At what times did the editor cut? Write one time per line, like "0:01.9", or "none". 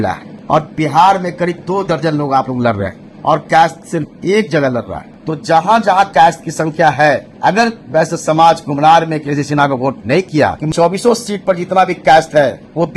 none